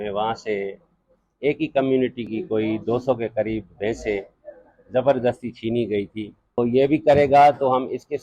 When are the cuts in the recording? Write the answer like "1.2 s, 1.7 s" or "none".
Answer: 6.6 s